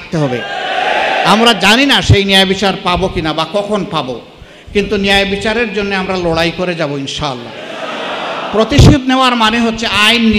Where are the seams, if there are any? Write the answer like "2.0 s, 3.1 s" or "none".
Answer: none